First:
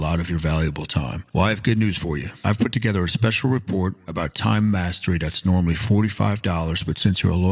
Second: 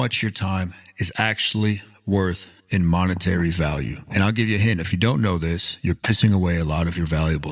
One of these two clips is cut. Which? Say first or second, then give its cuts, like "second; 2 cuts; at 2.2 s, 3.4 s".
second; 1 cut; at 2.5 s